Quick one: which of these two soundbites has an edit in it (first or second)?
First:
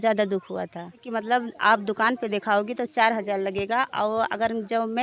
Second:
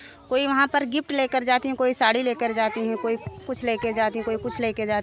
first